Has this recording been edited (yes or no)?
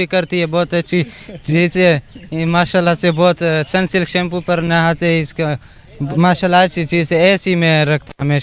no